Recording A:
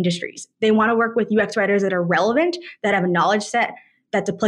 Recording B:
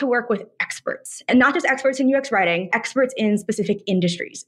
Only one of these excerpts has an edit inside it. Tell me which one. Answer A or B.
B